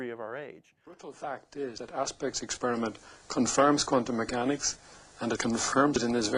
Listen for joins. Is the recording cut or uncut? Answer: uncut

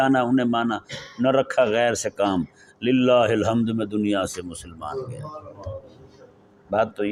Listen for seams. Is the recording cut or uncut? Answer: uncut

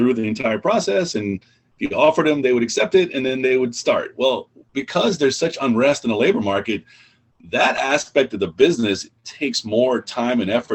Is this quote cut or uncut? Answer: uncut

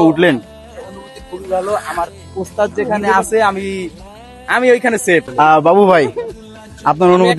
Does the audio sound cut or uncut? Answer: cut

